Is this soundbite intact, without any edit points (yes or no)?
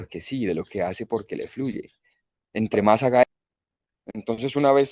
no